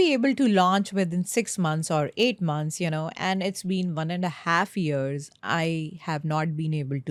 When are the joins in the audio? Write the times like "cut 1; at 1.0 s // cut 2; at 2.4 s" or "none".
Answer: none